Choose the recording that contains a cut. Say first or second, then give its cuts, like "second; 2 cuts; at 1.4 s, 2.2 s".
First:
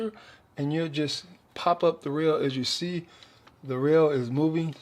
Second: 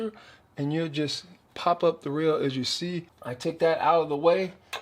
second; 1 cut; at 3.2 s